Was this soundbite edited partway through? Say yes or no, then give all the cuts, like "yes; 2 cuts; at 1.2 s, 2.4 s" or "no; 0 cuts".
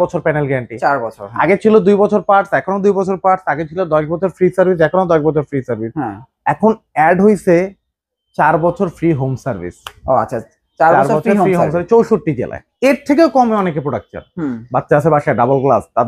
yes; 1 cut; at 12.6 s